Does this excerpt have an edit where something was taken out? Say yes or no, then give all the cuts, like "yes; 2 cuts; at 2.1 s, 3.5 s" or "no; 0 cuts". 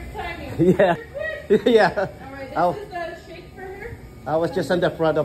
yes; 1 cut; at 1.0 s